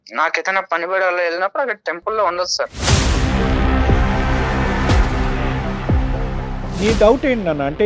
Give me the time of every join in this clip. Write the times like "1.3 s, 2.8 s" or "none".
2.8 s, 6.8 s